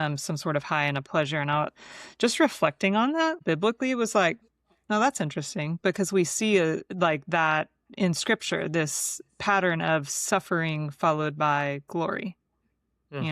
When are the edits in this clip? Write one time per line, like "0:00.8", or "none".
0:03.4